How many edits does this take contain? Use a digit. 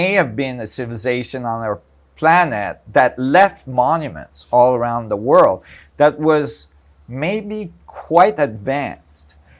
0